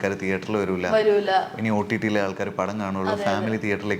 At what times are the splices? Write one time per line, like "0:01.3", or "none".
none